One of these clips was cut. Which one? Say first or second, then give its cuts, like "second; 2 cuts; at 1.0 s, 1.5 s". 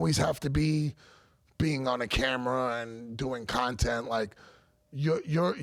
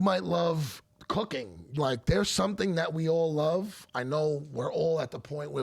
second; 1 cut; at 1.8 s